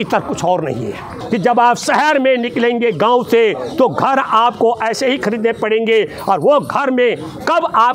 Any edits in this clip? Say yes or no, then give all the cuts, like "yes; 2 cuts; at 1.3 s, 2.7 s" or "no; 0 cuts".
yes; 1 cut; at 1.2 s